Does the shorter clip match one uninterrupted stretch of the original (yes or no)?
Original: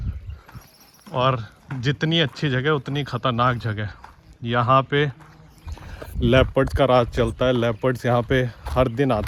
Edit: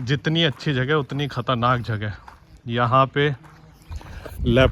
yes